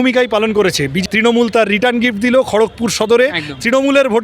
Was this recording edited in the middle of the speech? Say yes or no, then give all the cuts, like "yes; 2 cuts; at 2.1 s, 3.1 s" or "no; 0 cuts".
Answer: yes; 1 cut; at 1.0 s